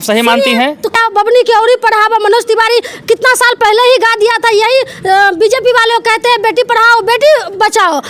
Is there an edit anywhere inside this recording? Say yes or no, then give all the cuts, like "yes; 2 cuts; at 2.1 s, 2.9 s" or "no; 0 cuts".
yes; 1 cut; at 1.0 s